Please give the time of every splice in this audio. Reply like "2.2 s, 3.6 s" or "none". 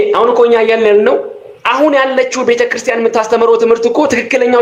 none